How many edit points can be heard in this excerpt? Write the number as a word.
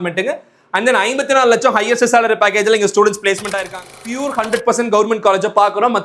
one